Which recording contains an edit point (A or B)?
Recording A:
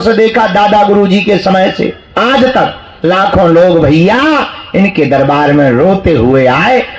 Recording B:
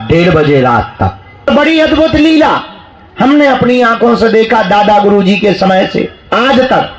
B